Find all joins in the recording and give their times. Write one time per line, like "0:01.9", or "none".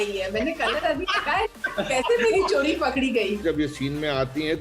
0:03.4

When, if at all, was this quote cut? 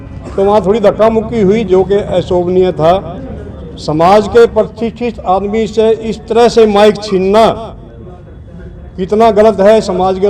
none

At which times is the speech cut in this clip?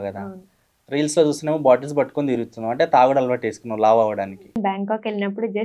0:04.6

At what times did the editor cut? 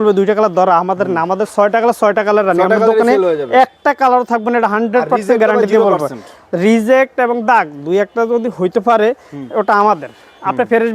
none

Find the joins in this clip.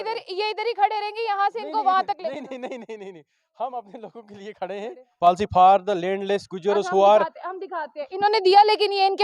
0:05.1

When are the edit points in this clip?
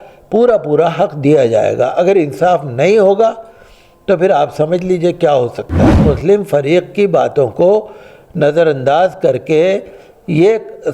0:06.0

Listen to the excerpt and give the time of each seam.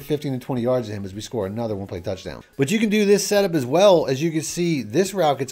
0:02.4

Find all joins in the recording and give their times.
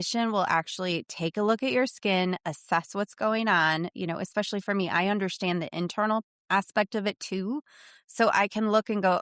none

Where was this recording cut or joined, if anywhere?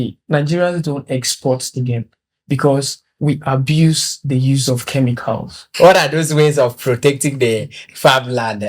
0:05.7

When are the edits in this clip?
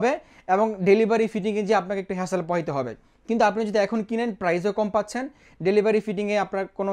none

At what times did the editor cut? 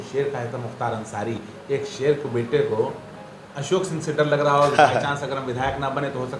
none

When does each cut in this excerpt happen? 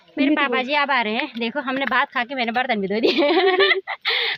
none

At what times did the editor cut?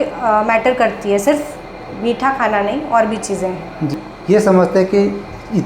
0:04.0

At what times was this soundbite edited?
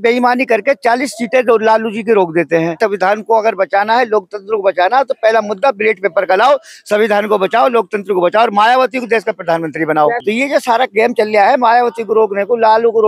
0:02.8
0:10.2

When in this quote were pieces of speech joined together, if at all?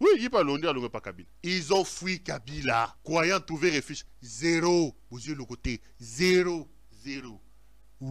none

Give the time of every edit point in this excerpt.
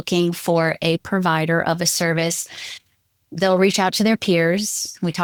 none

